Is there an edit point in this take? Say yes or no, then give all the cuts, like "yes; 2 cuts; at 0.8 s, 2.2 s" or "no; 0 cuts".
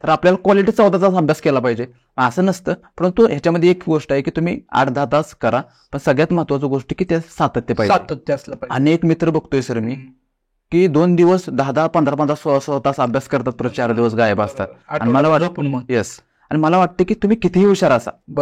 no; 0 cuts